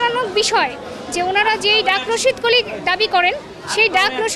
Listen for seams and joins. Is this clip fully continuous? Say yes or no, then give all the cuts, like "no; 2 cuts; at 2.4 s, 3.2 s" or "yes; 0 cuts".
yes; 0 cuts